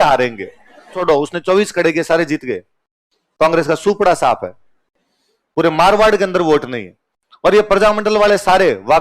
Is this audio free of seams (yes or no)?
no